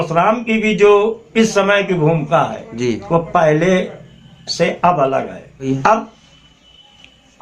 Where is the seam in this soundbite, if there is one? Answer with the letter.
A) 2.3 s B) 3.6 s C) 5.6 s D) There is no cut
C